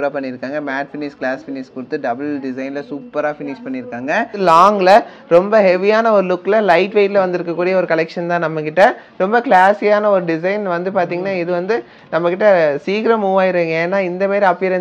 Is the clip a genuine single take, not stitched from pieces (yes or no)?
no